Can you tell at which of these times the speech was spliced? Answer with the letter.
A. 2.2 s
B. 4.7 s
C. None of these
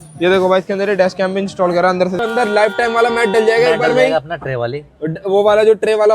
A